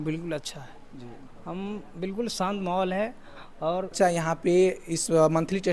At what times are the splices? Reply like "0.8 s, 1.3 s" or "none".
3.9 s